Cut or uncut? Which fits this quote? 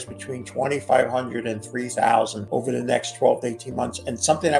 cut